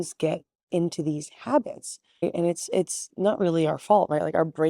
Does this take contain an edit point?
no; 0 cuts

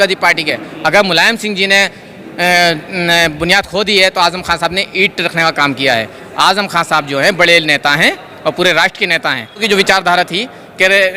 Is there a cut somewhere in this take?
yes; 1 cut; at 9.6 s

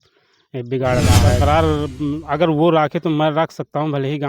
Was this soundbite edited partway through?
yes; 1 cut; at 1.4 s

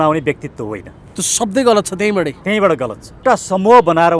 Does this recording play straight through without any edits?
no; 1 cut; at 3.2 s

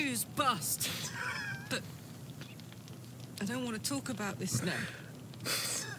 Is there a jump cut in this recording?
no; 0 cuts

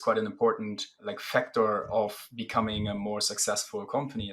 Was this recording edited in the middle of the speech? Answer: yes; 1 cut; at 1.0 s

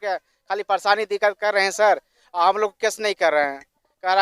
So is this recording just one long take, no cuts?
yes; 0 cuts

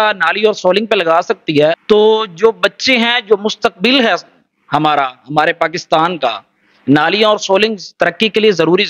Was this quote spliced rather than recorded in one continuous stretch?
yes; 1 cut; at 1.8 s

